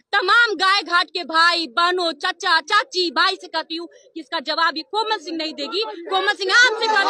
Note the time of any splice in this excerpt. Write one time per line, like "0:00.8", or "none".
none